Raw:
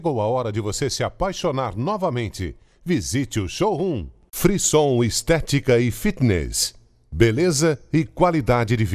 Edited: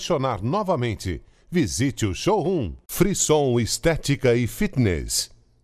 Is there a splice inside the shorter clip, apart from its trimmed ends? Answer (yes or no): yes